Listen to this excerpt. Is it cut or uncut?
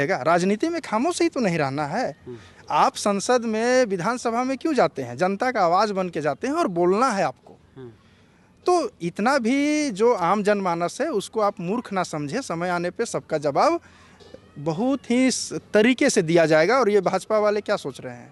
uncut